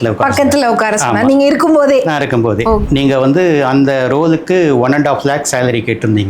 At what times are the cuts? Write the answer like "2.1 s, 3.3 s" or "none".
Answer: 2.8 s